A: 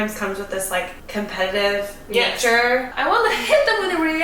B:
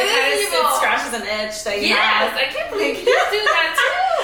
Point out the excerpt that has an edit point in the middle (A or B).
A